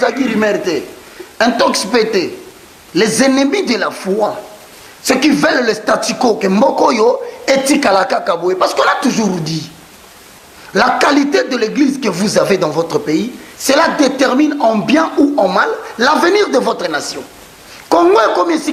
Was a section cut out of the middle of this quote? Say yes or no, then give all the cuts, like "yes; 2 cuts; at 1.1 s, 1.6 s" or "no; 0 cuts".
no; 0 cuts